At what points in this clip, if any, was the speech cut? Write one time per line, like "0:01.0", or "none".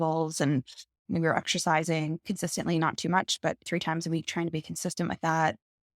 0:01.0
0:02.2